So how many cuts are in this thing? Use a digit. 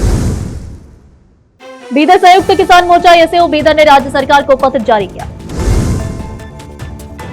1